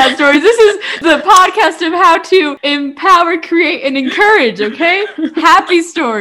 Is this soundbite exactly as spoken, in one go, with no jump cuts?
no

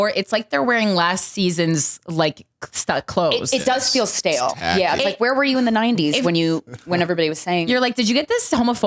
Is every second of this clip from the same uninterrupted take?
yes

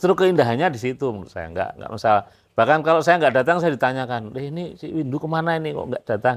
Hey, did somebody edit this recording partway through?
no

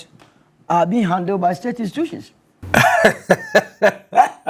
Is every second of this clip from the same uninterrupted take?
no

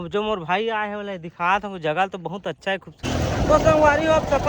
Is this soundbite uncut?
no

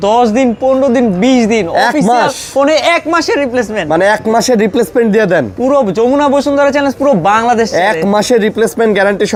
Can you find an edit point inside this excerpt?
no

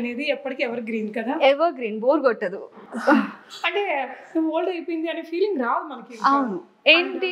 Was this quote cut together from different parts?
no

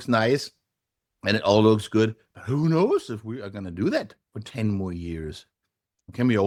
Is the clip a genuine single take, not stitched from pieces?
yes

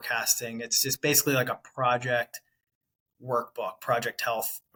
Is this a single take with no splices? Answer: yes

